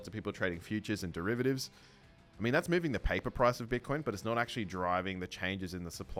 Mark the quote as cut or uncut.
uncut